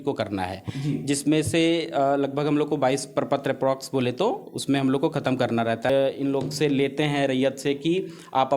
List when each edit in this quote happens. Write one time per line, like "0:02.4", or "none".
0:05.9

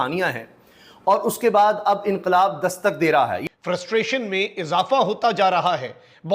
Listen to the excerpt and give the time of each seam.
0:03.4

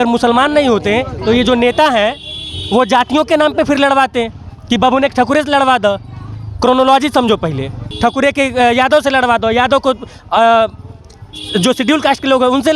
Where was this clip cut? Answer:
0:07.9

